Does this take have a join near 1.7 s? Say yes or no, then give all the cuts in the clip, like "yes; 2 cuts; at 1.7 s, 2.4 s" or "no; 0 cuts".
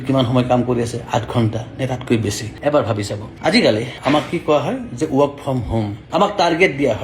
no; 2 cuts; at 3.2 s, 6.0 s